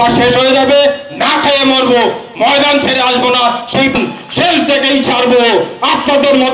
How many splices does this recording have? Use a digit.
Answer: 1